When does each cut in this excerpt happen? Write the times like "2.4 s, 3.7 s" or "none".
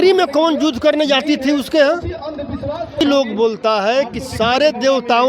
3.0 s